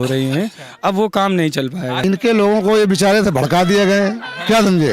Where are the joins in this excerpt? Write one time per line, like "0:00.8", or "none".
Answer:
0:01.9